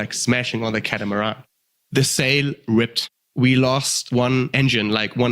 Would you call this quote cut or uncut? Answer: cut